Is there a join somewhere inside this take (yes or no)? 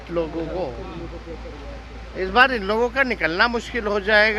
no